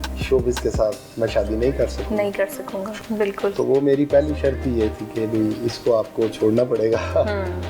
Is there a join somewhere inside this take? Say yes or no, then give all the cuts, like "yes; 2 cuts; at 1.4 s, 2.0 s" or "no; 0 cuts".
yes; 1 cut; at 2.9 s